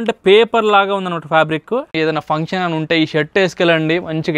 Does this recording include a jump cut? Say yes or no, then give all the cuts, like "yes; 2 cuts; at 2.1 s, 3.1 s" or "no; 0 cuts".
yes; 1 cut; at 1.9 s